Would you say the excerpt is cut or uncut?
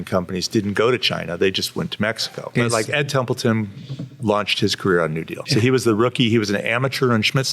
cut